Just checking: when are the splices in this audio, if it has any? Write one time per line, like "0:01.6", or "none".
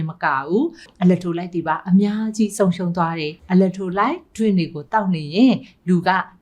0:00.9
0:03.3